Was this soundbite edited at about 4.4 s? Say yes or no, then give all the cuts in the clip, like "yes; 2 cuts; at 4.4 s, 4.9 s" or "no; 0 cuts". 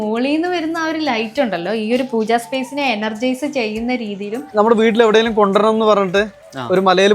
yes; 1 cut; at 4.4 s